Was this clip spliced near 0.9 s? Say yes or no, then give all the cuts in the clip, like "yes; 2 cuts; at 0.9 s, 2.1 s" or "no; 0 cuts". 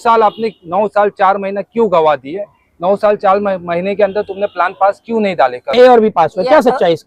no; 1 cut; at 5.7 s